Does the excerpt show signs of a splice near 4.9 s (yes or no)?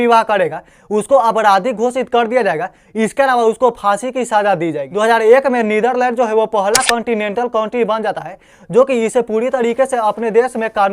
yes